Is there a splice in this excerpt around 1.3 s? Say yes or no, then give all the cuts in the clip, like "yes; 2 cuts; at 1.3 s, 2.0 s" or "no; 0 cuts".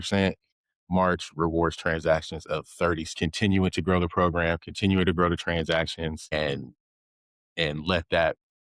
no; 2 cuts; at 3.1 s, 6.3 s